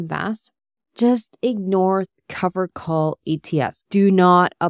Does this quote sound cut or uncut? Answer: cut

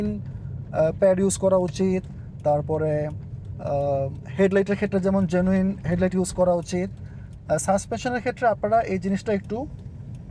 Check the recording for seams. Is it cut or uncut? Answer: uncut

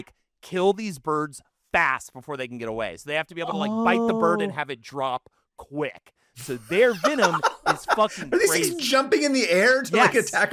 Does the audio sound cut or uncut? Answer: uncut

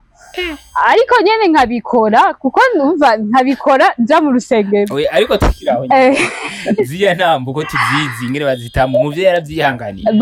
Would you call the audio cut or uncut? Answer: uncut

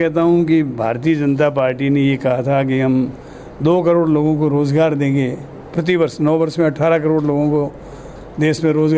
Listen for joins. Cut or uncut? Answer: uncut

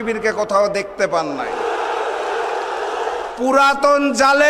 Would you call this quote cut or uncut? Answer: cut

